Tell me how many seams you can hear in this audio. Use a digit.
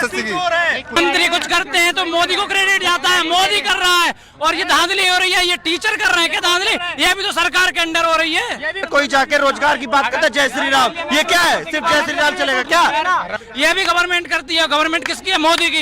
3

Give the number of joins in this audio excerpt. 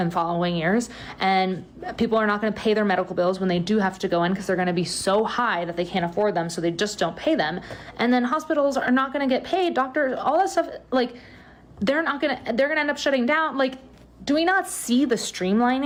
0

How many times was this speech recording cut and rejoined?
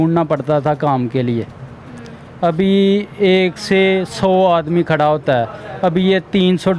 0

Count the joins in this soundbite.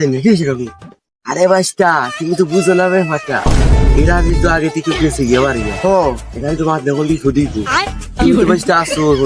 0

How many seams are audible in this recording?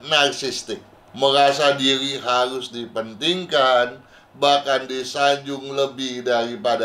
1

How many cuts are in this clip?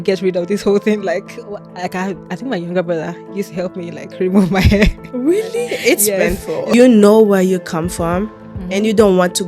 1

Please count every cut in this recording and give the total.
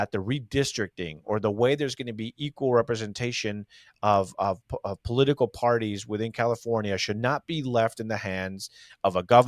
0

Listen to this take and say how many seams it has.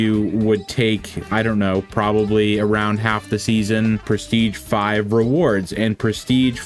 1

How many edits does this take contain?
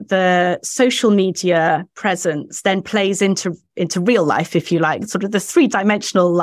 0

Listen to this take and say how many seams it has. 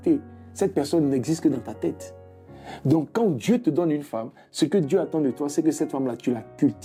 0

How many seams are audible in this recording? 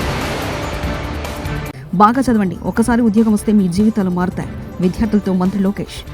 1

